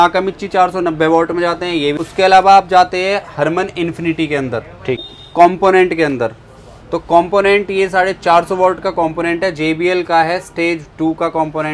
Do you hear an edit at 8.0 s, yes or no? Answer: no